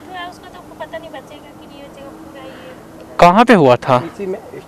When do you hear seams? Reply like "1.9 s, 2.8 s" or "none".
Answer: none